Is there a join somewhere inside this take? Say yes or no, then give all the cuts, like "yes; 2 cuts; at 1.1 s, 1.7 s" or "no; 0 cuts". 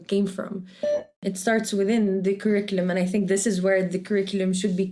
yes; 1 cut; at 1.0 s